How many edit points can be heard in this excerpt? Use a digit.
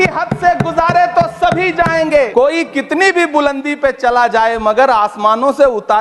1